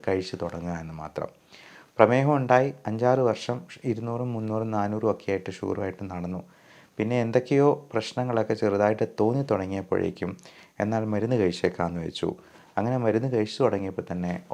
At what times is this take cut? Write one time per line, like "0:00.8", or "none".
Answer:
none